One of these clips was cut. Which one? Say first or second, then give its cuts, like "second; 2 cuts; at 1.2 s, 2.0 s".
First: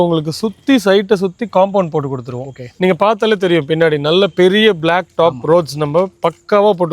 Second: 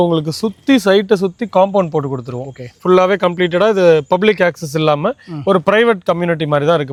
first; 1 cut; at 2.8 s